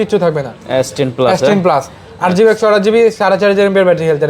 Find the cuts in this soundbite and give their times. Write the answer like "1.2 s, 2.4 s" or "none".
none